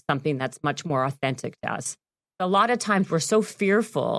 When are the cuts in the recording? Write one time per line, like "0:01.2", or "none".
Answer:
0:02.4